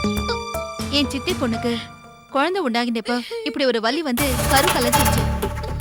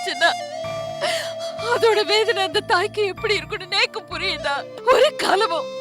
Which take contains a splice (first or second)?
second